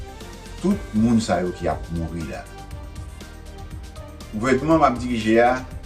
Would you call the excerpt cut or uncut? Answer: cut